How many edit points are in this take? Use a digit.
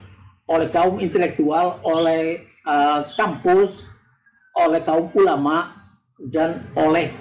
0